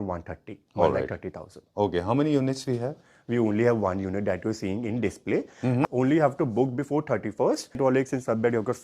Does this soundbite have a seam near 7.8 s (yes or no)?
yes